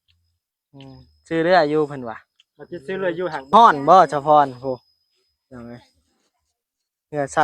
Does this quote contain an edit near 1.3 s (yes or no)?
no